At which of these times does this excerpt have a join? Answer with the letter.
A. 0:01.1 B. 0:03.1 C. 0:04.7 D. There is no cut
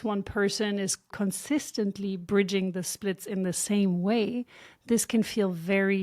A